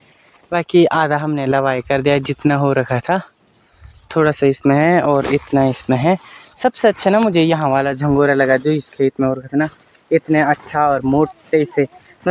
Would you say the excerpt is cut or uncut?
uncut